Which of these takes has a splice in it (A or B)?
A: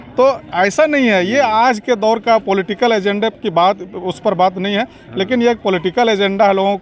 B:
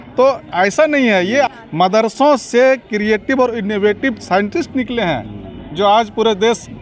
B